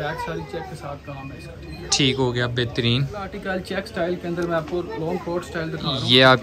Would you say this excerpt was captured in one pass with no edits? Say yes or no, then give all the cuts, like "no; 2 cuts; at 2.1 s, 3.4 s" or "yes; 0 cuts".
no; 1 cut; at 3.3 s